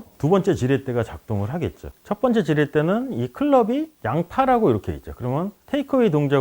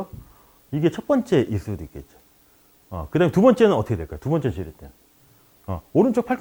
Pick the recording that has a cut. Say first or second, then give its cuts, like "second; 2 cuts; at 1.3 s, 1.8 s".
first; 1 cut; at 1.9 s